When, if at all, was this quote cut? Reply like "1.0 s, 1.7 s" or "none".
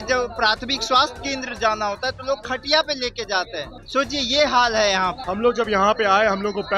3.8 s, 5.2 s